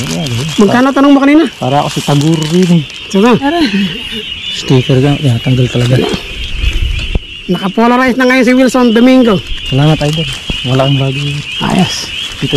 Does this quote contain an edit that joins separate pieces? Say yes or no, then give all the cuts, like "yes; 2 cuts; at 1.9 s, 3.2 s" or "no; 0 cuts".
yes; 1 cut; at 3.7 s